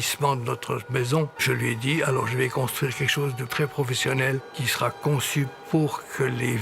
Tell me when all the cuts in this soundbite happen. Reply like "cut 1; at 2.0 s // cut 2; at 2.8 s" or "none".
cut 1; at 1.4 s // cut 2; at 4.6 s